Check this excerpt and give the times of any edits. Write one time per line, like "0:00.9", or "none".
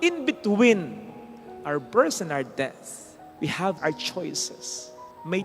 0:03.8